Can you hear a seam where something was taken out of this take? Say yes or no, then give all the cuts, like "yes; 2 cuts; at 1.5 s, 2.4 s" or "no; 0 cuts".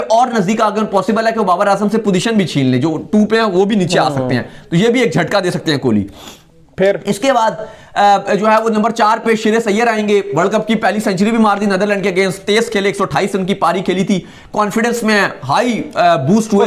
no; 0 cuts